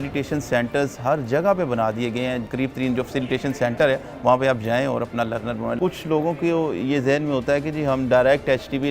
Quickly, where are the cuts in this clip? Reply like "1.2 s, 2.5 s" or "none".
2.4 s, 5.8 s